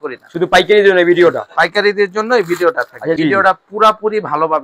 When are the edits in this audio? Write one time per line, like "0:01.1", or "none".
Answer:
0:03.1